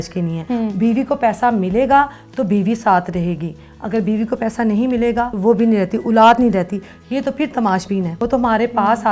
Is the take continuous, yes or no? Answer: yes